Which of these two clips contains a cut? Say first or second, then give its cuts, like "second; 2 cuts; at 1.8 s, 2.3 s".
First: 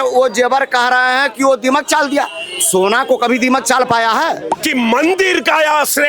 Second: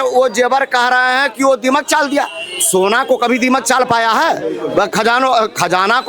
first; 1 cut; at 4.5 s